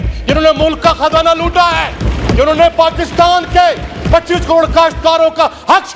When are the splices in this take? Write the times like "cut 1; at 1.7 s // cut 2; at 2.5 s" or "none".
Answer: none

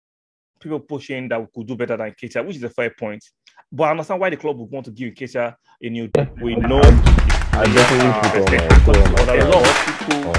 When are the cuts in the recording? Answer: cut 1; at 6.1 s

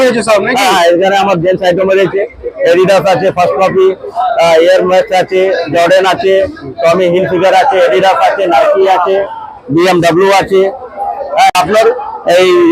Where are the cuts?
cut 1; at 11.5 s

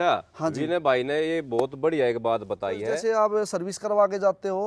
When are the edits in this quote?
cut 1; at 2.9 s

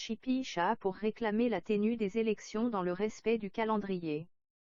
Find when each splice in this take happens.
none

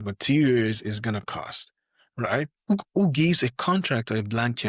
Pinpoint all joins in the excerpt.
cut 1; at 2.6 s

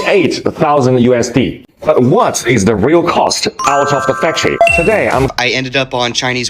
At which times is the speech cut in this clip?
cut 1; at 5.3 s

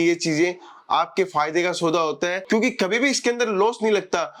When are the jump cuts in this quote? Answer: none

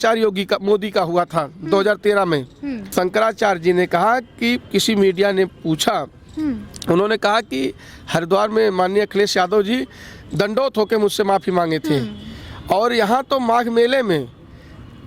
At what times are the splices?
cut 1; at 2.8 s

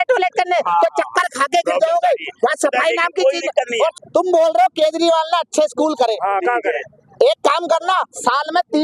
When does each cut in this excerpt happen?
cut 1; at 3.9 s

